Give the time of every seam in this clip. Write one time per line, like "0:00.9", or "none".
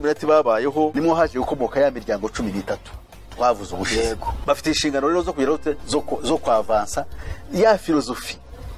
0:00.9
0:04.4